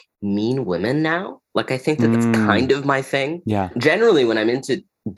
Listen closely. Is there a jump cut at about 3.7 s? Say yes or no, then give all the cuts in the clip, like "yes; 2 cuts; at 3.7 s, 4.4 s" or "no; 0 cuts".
yes; 2 cuts; at 2.5 s, 3.7 s